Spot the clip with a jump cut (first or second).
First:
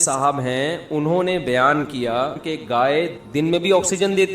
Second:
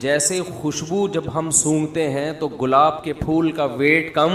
first